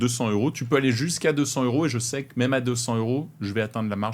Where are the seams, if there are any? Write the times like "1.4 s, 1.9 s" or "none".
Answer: none